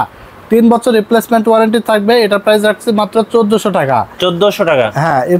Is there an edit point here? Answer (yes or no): no